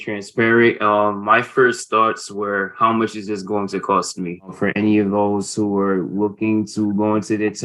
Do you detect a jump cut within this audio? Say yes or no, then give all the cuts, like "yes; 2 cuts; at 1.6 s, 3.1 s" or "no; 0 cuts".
yes; 1 cut; at 4.5 s